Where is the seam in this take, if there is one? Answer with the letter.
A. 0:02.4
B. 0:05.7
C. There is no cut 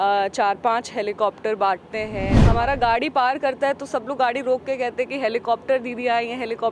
A